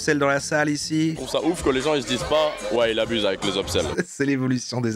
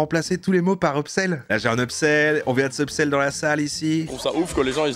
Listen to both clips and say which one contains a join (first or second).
second